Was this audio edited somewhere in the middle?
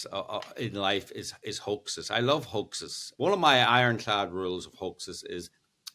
yes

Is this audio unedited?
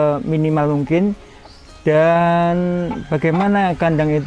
yes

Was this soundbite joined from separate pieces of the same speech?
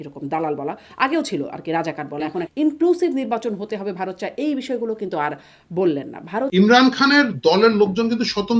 yes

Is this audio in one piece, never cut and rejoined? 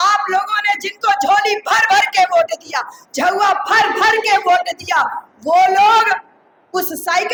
yes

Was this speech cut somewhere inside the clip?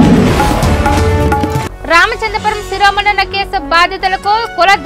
no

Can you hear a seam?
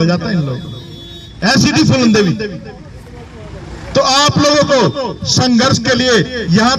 no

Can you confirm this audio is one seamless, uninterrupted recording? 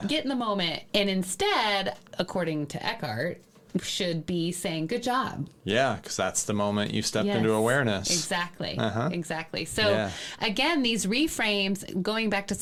yes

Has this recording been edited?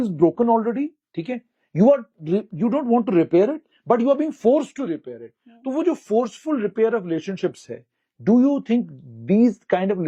no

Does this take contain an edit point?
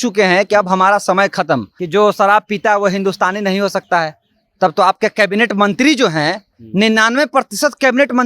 yes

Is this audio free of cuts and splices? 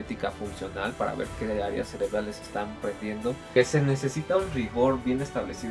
no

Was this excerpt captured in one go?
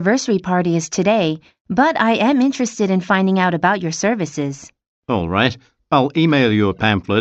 yes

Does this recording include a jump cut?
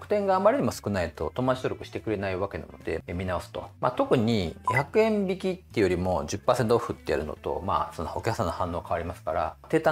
yes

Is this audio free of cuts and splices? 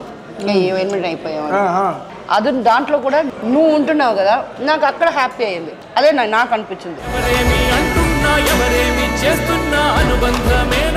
no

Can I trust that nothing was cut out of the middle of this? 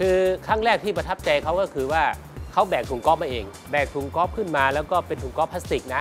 no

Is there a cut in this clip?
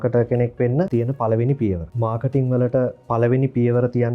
yes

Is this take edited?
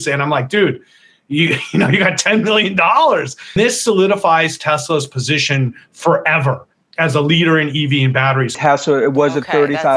yes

